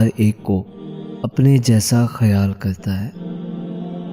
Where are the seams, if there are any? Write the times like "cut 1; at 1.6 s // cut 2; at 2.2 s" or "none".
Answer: cut 1; at 3.2 s